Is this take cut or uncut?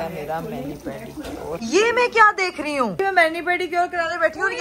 uncut